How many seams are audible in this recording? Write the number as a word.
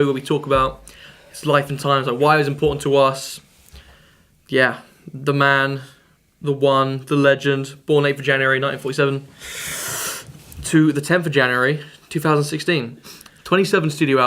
one